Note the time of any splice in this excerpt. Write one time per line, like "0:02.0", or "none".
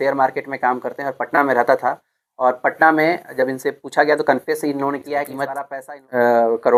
none